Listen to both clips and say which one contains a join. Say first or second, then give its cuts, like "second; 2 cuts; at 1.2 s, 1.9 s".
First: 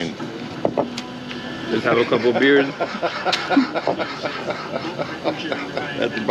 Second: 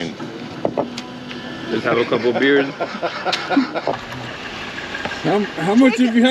second; 1 cut; at 3.9 s